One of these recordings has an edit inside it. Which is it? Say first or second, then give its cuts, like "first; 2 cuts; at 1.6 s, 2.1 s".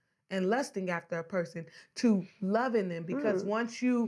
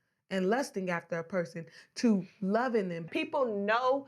second; 1 cut; at 3.1 s